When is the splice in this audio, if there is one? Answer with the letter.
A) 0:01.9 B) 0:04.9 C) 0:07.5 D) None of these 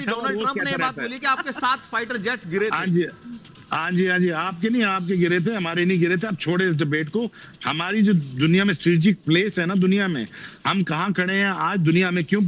D